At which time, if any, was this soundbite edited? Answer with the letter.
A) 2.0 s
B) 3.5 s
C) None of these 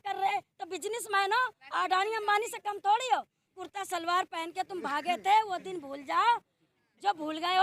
B